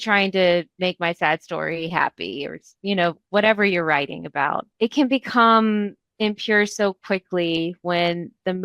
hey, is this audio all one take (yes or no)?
no